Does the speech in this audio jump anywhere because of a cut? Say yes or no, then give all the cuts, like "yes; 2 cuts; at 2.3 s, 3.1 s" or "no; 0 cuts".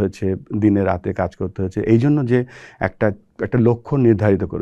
no; 0 cuts